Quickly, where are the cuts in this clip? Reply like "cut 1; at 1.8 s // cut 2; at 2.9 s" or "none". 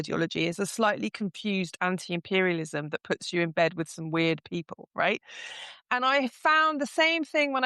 none